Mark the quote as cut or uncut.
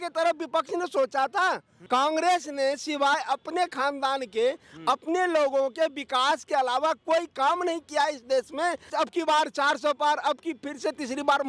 cut